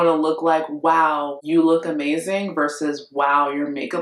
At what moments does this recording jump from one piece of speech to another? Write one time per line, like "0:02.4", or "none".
0:01.3